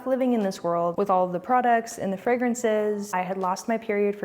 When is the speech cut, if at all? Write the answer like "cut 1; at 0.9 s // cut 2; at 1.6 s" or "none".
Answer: cut 1; at 0.9 s // cut 2; at 3.1 s